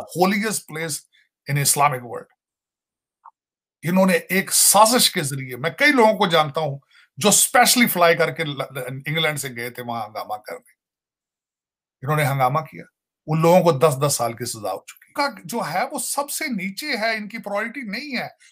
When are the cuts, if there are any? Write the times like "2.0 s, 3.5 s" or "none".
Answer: 15.0 s